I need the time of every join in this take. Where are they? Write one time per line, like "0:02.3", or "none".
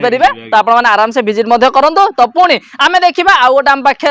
none

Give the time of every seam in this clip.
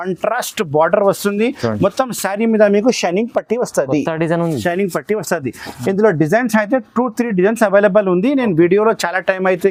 none

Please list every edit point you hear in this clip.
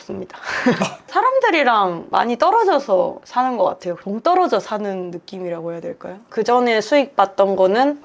0:01.0
0:03.2
0:06.2

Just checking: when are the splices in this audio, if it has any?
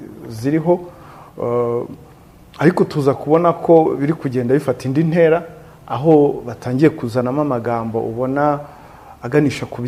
none

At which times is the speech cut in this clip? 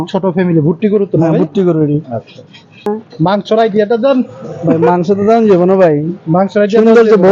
0:02.9

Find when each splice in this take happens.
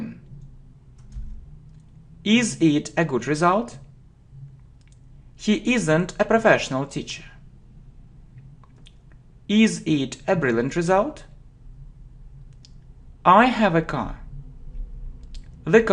0:10.7

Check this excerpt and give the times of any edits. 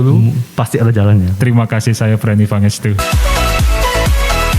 0:03.0

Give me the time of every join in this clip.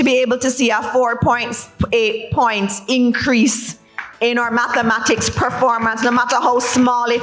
none

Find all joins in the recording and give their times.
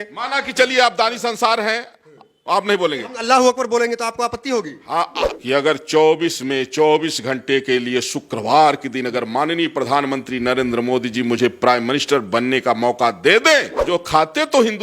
0:05.2
0:13.8

